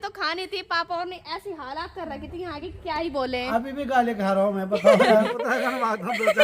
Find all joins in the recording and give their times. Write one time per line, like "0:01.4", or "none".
0:05.4